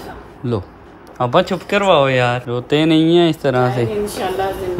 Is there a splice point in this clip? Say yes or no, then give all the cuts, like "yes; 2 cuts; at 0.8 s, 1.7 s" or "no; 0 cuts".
no; 0 cuts